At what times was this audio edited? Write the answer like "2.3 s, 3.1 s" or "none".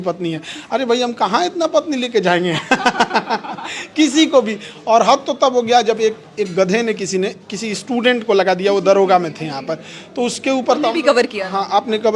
none